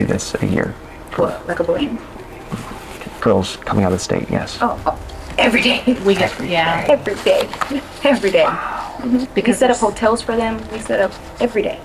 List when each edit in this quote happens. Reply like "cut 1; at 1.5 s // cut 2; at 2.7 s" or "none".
none